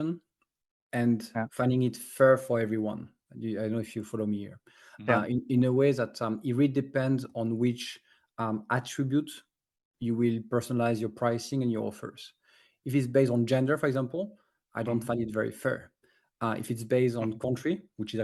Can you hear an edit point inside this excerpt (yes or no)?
no